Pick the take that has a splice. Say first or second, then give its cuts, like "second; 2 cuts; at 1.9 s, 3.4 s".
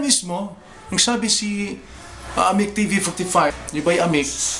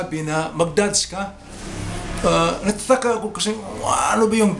first; 1 cut; at 3.6 s